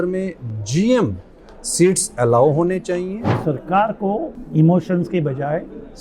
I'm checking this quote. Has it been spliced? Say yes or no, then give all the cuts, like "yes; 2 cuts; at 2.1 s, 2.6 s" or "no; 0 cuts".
yes; 2 cuts; at 3.4 s, 4.4 s